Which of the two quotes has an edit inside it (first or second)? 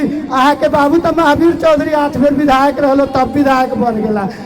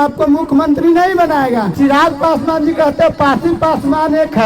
second